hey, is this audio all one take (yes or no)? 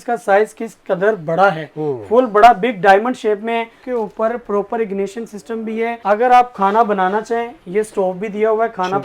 no